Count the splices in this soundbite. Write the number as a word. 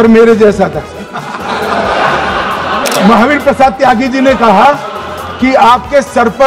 one